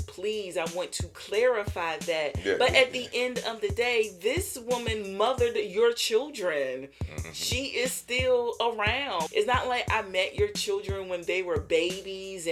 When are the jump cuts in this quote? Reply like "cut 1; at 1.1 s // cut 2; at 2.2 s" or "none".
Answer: none